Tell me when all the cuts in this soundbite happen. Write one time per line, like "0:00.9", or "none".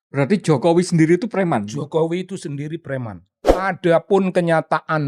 0:03.6